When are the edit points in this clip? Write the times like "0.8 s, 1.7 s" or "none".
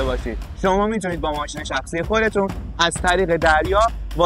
none